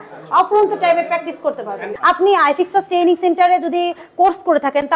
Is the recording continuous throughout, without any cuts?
no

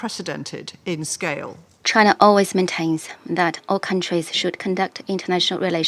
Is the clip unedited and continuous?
no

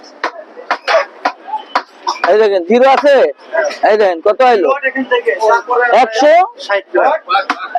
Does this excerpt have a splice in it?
no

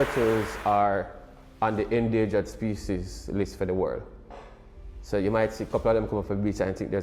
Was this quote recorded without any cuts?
yes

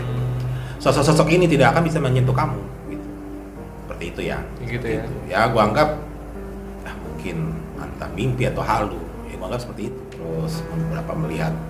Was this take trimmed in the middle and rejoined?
yes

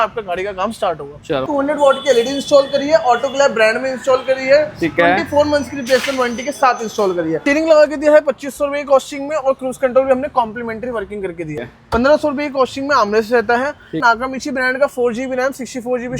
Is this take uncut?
no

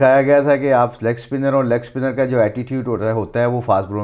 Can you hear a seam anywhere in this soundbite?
no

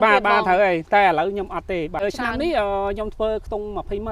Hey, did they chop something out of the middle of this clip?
yes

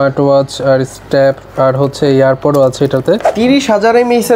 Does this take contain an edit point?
yes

